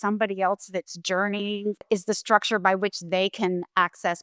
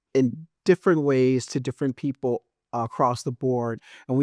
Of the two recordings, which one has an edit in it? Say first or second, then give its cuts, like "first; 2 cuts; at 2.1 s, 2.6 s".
first; 1 cut; at 1.8 s